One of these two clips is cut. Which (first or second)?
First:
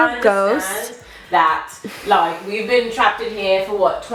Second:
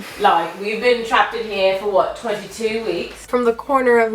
second